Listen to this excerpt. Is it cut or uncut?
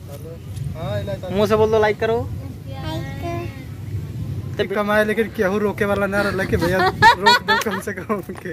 cut